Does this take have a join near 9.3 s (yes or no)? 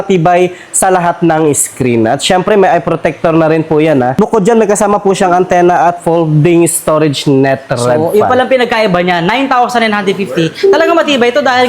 no